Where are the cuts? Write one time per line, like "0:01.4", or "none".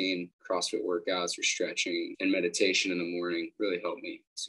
0:02.1
0:03.5